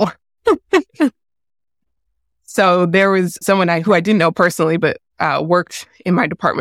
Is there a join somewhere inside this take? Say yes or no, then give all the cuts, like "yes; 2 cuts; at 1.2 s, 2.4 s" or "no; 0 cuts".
no; 0 cuts